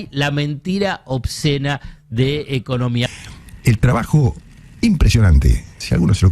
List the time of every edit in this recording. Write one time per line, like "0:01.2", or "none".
0:03.1